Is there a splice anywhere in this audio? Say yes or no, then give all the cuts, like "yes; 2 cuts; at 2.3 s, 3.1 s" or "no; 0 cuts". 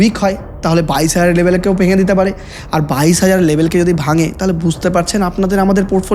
no; 0 cuts